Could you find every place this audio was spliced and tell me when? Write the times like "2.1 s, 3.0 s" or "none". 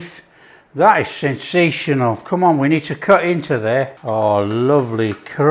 4.0 s